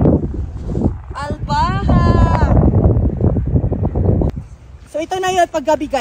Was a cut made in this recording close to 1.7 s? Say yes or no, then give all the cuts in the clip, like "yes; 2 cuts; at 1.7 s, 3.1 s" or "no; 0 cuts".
no; 1 cut; at 4.1 s